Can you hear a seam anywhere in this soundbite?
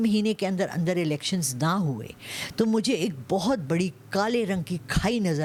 no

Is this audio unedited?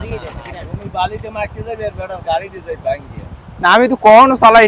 yes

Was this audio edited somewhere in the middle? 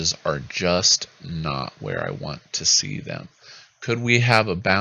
no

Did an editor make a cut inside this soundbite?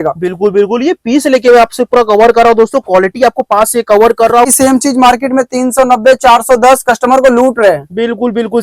yes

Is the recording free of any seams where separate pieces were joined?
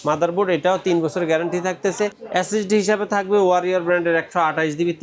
no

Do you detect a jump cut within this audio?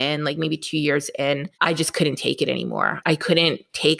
yes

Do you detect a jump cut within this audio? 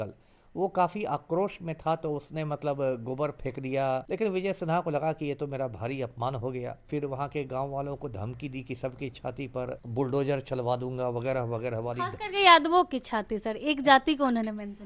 yes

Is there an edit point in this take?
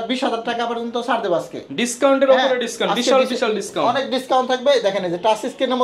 no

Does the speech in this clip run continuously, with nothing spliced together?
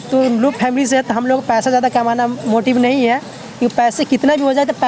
yes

